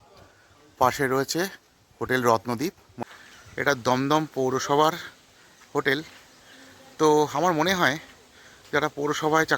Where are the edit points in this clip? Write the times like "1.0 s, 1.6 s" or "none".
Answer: 2.9 s